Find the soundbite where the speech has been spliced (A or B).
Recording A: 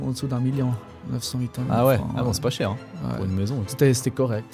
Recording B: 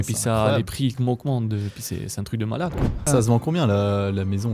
B